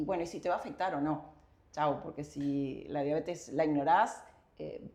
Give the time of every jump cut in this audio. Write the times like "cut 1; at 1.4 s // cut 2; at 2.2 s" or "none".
none